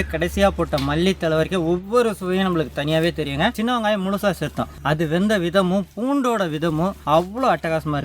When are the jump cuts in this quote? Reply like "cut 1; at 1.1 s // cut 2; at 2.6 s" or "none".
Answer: cut 1; at 3.6 s // cut 2; at 4.7 s // cut 3; at 7.0 s